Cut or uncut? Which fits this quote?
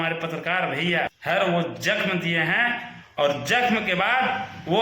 cut